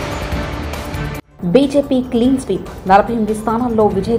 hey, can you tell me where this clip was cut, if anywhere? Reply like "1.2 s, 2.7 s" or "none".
1.2 s